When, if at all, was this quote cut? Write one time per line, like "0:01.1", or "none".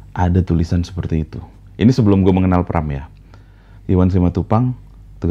none